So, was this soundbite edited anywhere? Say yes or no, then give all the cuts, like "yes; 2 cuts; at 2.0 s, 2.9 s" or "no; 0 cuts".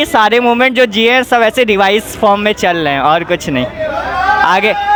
no; 0 cuts